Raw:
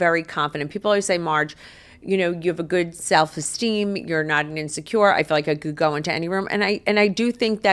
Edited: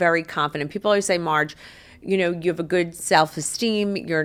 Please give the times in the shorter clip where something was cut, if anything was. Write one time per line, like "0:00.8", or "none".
none